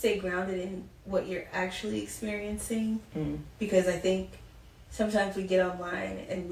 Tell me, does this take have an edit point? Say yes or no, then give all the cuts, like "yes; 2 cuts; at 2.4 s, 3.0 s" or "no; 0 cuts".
no; 0 cuts